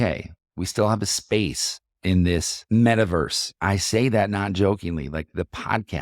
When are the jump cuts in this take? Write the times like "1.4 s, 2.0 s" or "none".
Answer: 2.6 s, 3.5 s